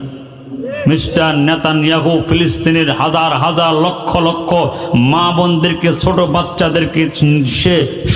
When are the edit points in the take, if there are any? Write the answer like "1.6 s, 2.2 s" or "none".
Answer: none